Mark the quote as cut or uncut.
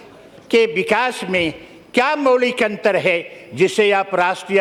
uncut